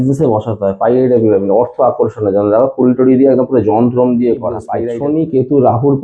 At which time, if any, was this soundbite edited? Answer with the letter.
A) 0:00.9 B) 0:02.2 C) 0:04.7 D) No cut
C